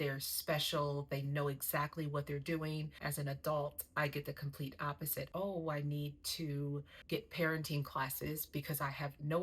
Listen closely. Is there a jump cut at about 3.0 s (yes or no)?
yes